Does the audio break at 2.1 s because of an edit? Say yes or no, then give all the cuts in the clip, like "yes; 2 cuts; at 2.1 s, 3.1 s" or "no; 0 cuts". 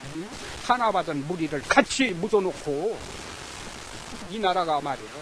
yes; 1 cut; at 2.1 s